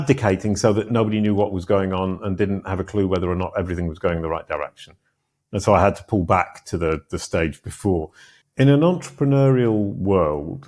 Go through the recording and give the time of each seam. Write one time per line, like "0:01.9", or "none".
0:08.3